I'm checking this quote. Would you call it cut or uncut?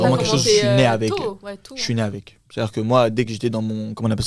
uncut